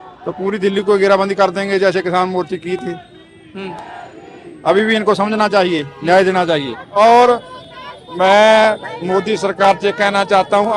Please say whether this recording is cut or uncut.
cut